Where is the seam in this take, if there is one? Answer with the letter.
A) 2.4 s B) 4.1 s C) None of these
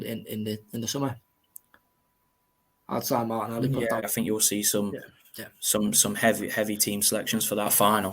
B